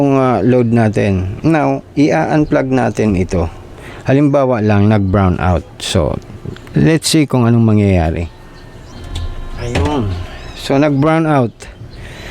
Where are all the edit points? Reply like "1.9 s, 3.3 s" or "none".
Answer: 8.9 s